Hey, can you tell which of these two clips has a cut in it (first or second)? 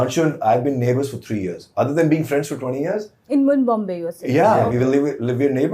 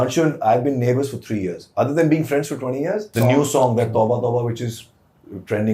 second